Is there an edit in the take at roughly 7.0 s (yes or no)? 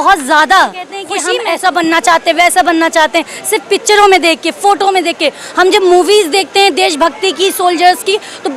no